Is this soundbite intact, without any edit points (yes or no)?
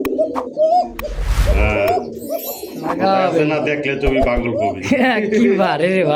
yes